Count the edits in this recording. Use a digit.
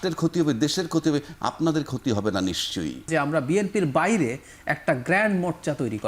1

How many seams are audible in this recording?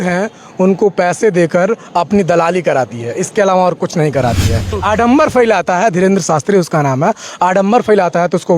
1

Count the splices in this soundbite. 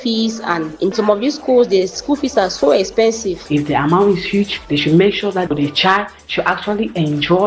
2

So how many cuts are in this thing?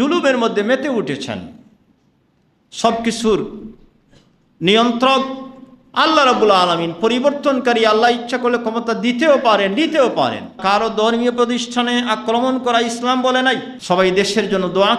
2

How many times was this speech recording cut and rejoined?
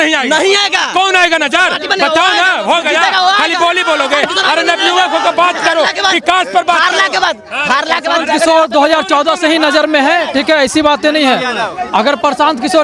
0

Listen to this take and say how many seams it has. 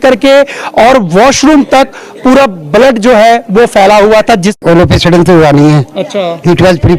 1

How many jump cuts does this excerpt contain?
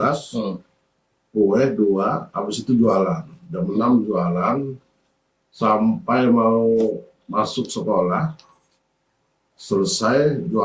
0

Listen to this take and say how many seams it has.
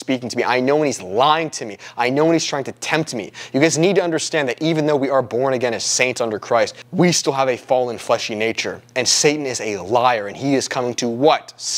1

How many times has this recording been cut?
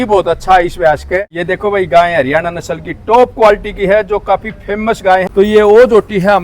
2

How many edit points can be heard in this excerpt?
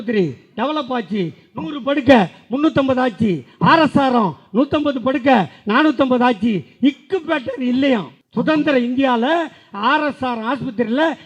1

